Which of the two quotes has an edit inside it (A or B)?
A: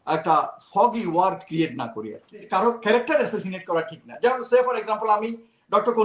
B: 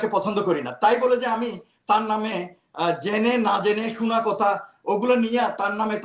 A